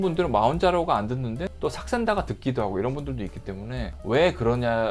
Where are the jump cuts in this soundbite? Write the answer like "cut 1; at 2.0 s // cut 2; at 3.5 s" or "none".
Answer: none